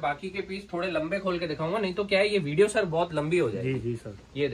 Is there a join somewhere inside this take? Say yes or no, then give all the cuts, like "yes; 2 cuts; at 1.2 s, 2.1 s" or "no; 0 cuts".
no; 0 cuts